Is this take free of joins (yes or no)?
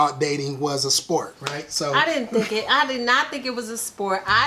yes